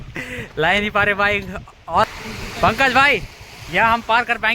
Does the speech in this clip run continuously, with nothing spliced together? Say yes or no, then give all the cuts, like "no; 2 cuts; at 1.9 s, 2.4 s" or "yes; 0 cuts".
no; 1 cut; at 2.2 s